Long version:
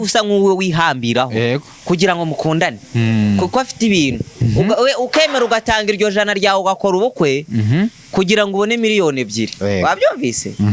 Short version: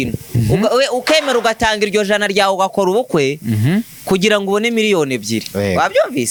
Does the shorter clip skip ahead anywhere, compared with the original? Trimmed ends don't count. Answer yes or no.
no